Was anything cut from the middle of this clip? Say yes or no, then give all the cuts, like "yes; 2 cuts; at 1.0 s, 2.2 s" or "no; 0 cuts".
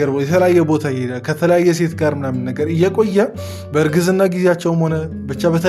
no; 0 cuts